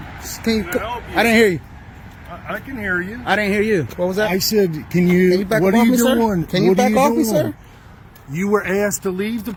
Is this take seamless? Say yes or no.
yes